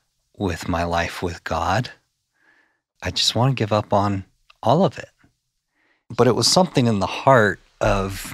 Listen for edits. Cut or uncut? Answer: cut